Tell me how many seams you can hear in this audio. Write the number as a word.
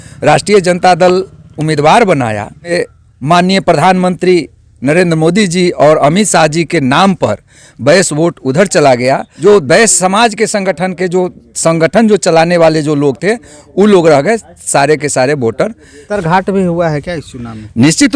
three